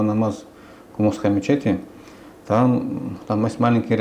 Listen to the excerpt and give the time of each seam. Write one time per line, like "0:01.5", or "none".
none